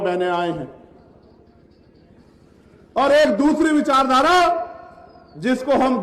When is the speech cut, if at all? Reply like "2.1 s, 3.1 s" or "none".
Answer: 1.5 s